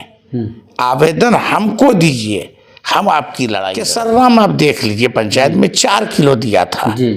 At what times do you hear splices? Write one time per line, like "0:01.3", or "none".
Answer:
0:03.7